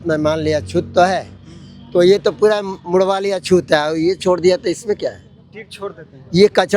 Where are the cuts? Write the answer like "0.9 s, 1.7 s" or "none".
none